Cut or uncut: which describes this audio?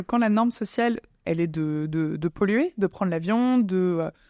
cut